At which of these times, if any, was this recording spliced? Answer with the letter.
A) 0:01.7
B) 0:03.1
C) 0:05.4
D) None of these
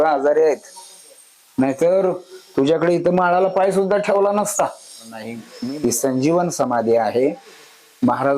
C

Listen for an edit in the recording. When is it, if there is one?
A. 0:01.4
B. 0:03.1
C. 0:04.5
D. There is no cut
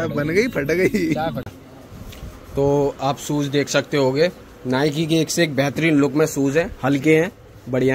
A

